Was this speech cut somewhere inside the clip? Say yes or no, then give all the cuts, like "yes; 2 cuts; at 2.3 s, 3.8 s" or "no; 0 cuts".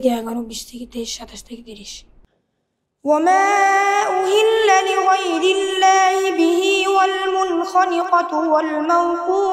yes; 1 cut; at 2.1 s